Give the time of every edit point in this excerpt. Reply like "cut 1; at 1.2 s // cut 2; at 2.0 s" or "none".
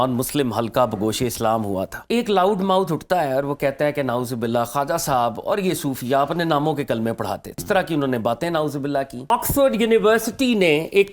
cut 1; at 2.0 s // cut 2; at 7.6 s // cut 3; at 9.3 s